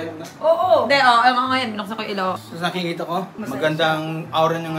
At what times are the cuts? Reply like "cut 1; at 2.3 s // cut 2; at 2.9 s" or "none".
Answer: cut 1; at 1.6 s // cut 2; at 3.2 s